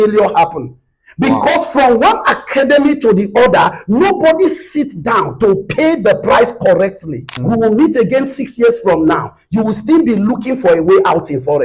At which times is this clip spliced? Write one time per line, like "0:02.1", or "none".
0:07.4